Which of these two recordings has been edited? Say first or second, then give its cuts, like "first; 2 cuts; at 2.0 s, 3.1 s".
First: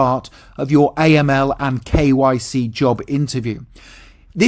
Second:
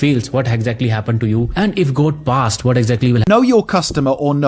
second; 1 cut; at 3.2 s